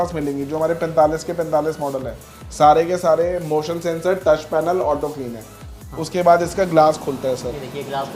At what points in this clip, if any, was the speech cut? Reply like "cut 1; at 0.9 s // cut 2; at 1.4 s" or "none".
cut 1; at 5.7 s